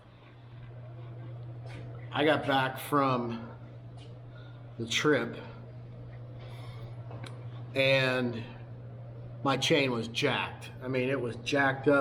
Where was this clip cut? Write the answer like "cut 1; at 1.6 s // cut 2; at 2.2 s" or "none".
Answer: none